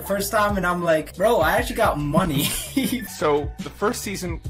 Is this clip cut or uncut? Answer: cut